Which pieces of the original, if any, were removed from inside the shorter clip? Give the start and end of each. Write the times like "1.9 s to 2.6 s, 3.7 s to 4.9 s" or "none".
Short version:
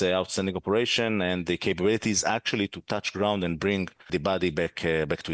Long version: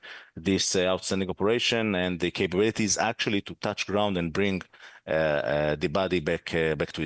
4.8 s to 5.8 s